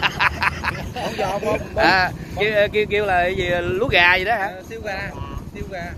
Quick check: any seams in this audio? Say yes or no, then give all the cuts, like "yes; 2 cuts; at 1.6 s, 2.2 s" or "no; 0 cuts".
no; 0 cuts